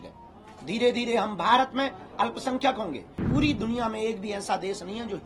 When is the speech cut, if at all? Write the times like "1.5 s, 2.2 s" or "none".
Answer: 3.2 s